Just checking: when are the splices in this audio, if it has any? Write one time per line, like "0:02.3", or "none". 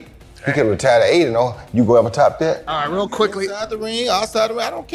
0:02.7